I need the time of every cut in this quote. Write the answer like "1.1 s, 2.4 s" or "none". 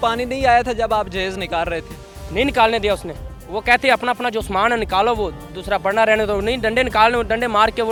none